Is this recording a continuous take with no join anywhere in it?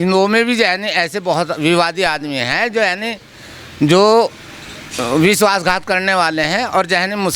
yes; 0 cuts

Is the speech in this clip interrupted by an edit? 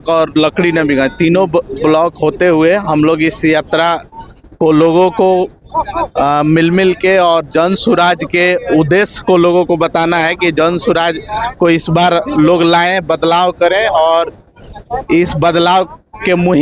no; 0 cuts

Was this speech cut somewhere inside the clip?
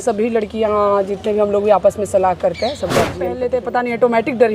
yes; 1 cut; at 3.4 s

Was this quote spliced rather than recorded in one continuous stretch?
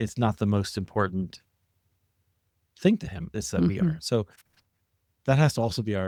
no; 0 cuts

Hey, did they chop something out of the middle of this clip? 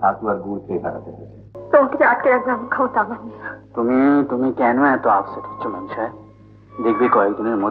yes; 1 cut; at 1.5 s

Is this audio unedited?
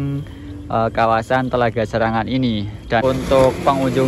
no; 1 cut; at 3.0 s

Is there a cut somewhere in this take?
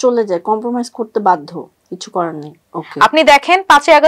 yes; 1 cut; at 2.5 s

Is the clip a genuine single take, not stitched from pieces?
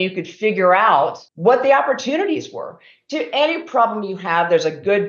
no; 1 cut; at 1.2 s

